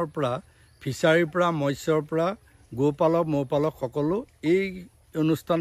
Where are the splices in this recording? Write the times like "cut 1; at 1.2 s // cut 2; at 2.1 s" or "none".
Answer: none